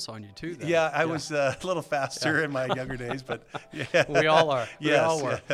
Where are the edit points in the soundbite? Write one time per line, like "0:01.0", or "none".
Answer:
none

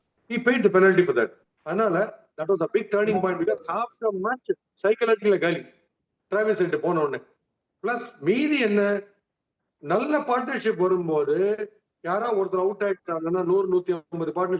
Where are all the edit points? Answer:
none

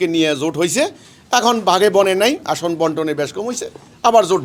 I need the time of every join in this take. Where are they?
none

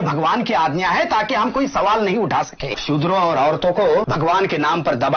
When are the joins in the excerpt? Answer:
0:02.8
0:04.1

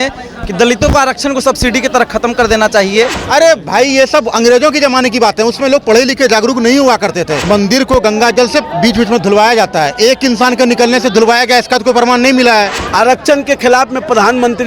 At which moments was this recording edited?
0:03.2
0:07.4
0:12.8

